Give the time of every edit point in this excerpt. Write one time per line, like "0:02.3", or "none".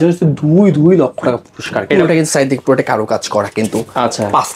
0:01.9